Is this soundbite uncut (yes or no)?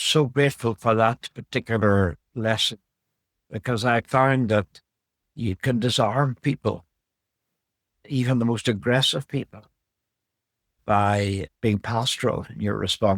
yes